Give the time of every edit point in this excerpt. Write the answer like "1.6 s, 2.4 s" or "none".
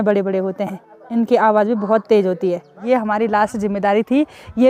2.8 s